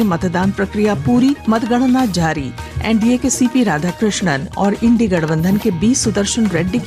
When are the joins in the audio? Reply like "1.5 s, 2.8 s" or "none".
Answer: 1.4 s